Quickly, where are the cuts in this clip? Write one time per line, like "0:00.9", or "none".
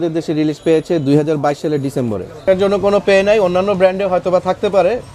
0:02.4